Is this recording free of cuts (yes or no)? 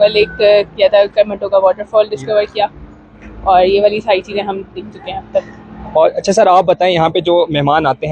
yes